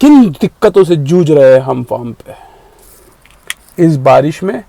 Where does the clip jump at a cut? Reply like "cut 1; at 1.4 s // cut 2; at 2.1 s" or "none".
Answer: none